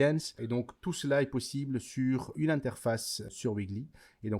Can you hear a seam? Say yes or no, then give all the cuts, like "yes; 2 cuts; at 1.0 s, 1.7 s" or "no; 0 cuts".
yes; 2 cuts; at 2.3 s, 3.3 s